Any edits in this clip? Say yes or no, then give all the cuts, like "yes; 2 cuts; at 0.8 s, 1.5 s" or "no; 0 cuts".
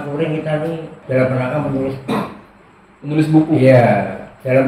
yes; 1 cut; at 0.9 s